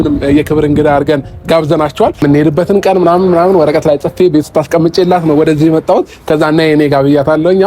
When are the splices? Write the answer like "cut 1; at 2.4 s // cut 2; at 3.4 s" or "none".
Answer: cut 1; at 2.2 s